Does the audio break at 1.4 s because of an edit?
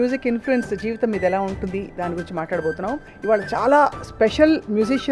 no; 1 cut; at 3.1 s

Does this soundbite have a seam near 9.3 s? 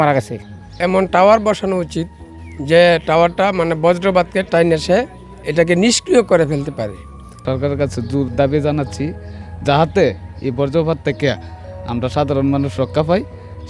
no; 3 cuts; at 0.8 s, 5.5 s, 7.4 s

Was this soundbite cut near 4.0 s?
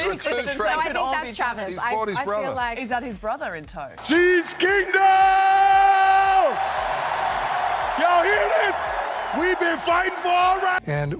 yes; 1 cut; at 4.0 s

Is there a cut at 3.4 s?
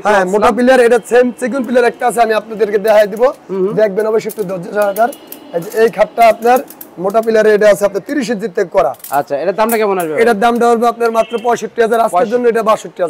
no; 0 cuts

